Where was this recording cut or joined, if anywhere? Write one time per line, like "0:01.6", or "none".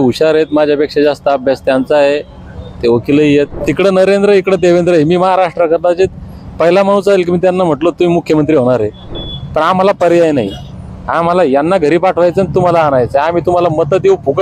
0:03.6
0:09.1